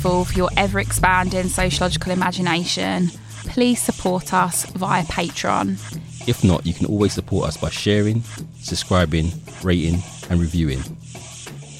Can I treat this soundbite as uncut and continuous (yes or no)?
no